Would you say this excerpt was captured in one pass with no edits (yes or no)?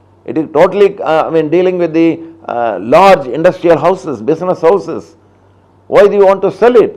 yes